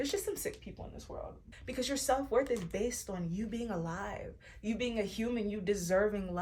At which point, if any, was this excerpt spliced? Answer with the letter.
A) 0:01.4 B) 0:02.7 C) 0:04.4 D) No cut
A